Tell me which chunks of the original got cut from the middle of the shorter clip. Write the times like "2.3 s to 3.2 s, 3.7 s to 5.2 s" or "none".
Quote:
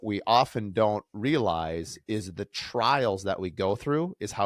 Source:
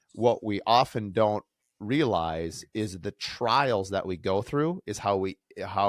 1.5 s to 1.8 s